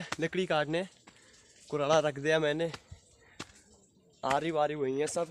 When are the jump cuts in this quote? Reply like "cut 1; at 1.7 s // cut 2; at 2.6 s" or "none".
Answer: none